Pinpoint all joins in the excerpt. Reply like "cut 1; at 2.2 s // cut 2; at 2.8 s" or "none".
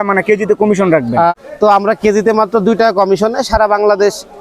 cut 1; at 1.3 s